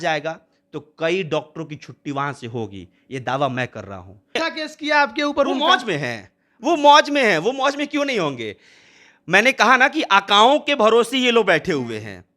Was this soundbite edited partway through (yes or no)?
yes